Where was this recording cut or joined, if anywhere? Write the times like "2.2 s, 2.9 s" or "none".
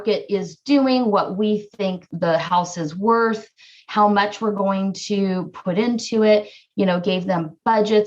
none